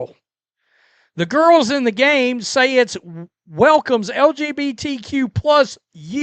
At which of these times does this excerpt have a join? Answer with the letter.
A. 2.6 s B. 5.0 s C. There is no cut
A